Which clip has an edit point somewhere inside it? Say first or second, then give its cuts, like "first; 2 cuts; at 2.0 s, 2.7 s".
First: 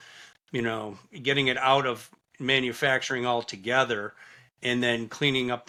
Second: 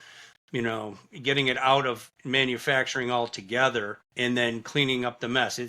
second; 2 cuts; at 2.1 s, 4.0 s